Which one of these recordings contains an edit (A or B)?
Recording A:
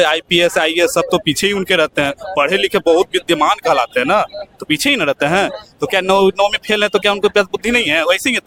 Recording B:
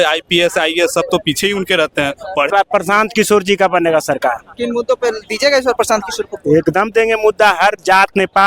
B